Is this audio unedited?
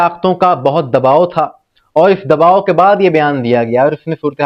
yes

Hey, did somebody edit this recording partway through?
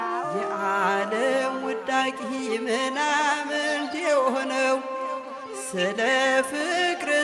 no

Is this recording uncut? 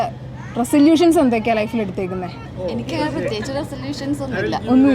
no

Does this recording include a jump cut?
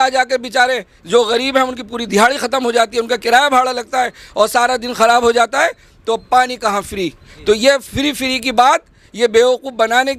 no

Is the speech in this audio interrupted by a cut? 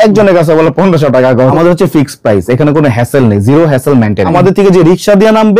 yes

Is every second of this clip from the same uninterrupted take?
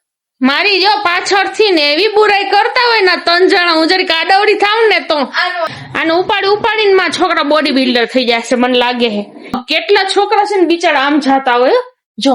no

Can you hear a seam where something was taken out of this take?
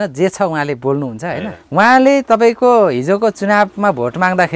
yes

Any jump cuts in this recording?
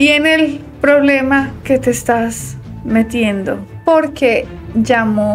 no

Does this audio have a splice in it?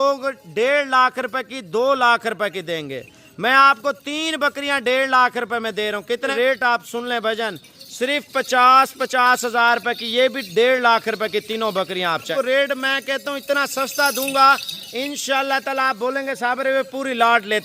yes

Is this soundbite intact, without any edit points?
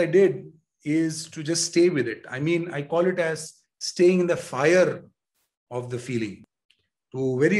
no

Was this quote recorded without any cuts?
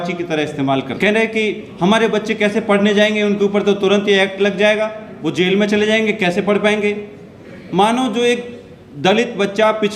no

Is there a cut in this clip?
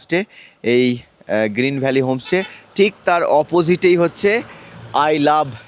no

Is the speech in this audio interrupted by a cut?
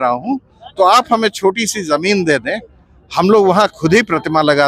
no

